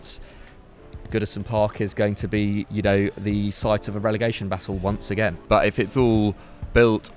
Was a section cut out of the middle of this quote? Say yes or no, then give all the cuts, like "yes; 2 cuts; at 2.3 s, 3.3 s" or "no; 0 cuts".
yes; 1 cut; at 5.4 s